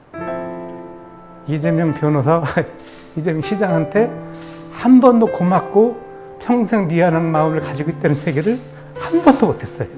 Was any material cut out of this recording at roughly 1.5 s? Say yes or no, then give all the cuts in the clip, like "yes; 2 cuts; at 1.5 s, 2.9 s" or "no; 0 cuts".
yes; 1 cut; at 1.5 s